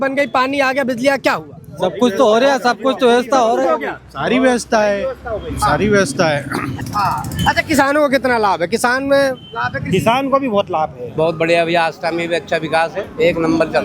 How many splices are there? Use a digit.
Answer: 2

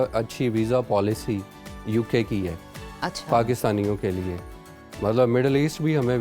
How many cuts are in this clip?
0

